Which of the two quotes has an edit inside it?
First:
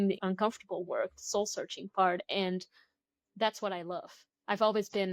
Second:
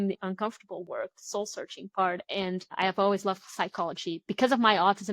second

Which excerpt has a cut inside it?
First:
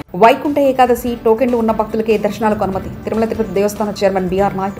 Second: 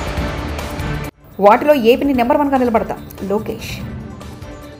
second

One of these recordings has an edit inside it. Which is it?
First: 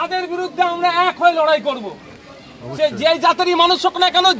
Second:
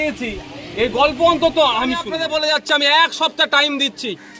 second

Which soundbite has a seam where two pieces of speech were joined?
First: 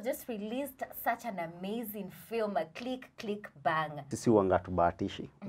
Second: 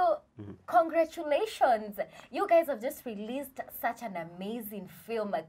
first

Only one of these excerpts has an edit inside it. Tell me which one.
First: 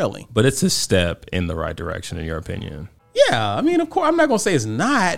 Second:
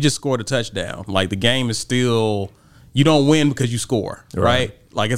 first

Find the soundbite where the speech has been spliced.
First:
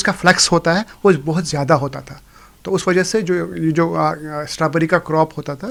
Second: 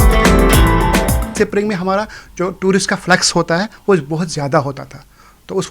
second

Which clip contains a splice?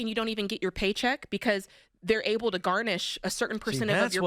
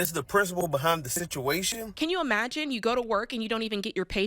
second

